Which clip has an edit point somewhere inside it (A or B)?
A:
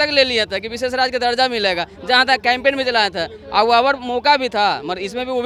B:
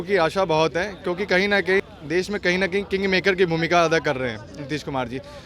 B